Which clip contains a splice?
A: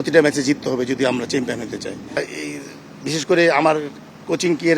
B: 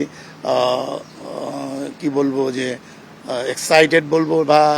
A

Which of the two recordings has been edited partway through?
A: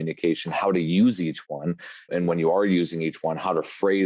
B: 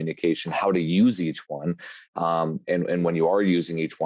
A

